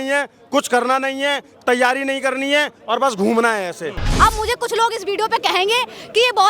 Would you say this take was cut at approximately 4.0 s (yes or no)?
yes